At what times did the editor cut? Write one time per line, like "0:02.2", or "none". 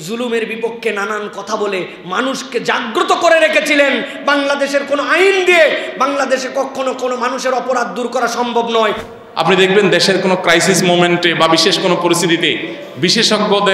0:09.0